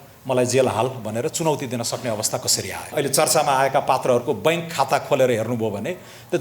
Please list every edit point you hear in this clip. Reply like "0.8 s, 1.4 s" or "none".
2.9 s